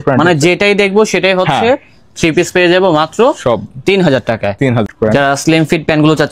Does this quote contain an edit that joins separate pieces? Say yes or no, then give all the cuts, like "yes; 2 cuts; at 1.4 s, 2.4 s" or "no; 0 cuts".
yes; 1 cut; at 4.8 s